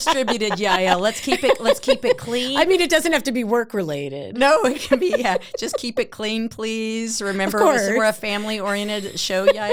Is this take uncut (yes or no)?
yes